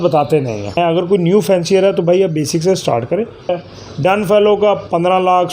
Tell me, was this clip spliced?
yes; 2 cuts; at 0.8 s, 3.6 s

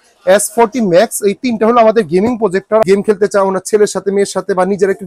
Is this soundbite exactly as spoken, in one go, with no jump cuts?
no; 1 cut; at 2.8 s

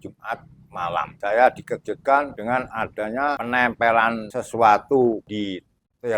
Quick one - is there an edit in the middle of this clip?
yes; 5 cuts; at 1.1 s, 2.3 s, 3.4 s, 4.3 s, 5.3 s

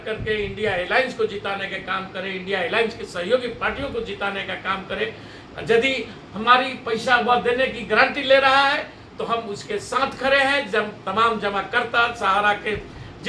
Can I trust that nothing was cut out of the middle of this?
yes; 0 cuts

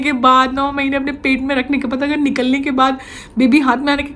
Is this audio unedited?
yes; 0 cuts

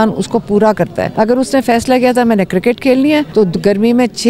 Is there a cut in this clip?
yes; 2 cuts; at 1.1 s, 3.3 s

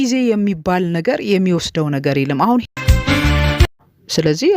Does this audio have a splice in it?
yes; 2 cuts; at 2.6 s, 3.6 s

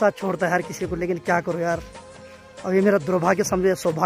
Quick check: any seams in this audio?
no; 0 cuts

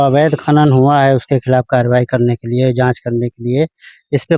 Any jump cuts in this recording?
no; 0 cuts

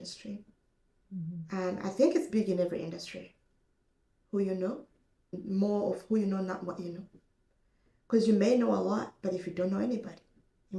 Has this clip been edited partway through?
no; 0 cuts

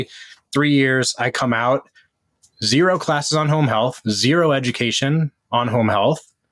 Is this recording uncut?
yes; 0 cuts

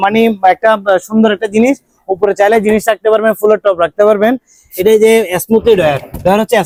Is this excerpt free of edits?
yes; 0 cuts

